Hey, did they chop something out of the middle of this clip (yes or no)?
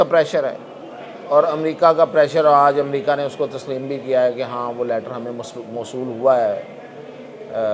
no